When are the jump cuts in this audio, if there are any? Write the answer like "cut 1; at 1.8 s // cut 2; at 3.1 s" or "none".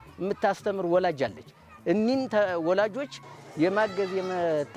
none